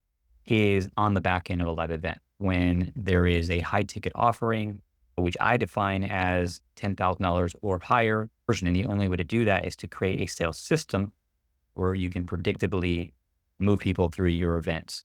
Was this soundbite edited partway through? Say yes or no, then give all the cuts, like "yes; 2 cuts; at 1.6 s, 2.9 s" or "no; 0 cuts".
yes; 1 cut; at 8.5 s